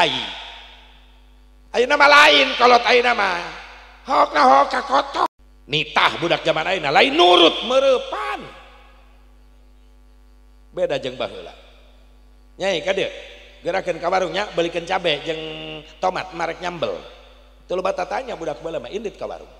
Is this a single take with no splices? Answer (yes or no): no